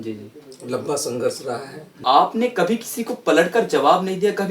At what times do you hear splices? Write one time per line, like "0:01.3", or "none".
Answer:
0:02.0